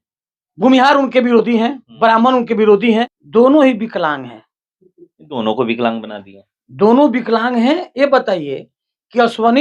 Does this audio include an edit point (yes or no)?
yes